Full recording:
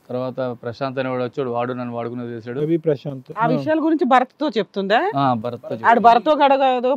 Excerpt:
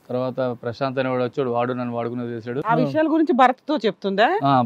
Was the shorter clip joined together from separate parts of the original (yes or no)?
yes